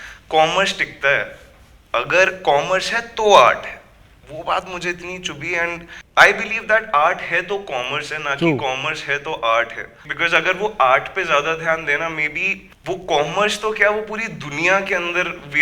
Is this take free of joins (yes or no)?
no